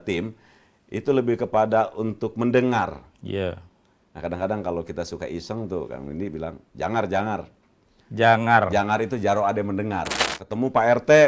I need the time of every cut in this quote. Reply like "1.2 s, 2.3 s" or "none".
10.2 s